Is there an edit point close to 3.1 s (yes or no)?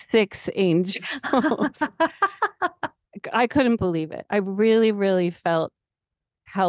yes